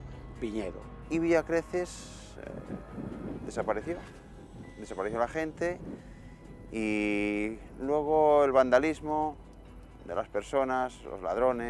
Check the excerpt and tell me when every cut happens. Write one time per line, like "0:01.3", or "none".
0:00.9